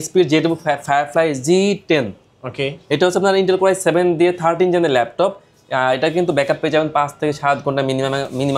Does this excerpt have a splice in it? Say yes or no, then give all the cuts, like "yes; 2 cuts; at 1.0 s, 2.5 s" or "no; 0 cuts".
no; 0 cuts